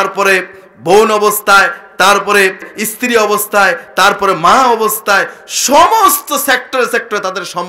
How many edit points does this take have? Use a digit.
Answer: 1